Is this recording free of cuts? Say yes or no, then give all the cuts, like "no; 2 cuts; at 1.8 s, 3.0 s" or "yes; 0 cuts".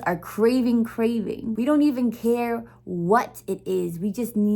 no; 1 cut; at 1.5 s